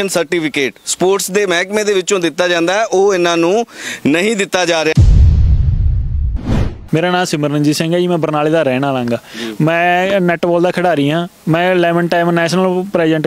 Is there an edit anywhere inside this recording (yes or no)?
yes